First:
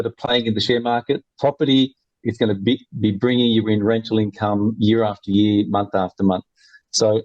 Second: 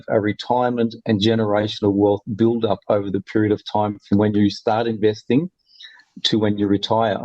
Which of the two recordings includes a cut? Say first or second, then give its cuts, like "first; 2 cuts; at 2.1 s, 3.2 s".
first; 1 cut; at 2.2 s